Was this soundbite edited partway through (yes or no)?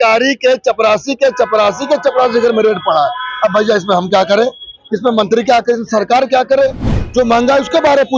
yes